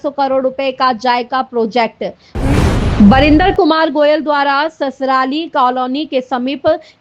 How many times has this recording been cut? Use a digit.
1